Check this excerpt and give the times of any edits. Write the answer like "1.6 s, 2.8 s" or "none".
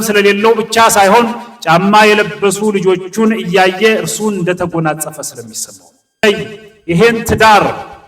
6.2 s